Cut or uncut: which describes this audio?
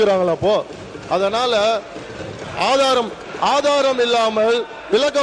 uncut